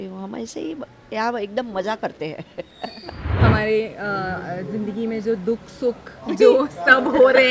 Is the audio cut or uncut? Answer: cut